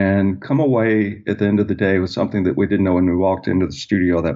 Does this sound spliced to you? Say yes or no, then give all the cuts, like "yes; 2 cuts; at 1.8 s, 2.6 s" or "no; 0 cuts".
no; 0 cuts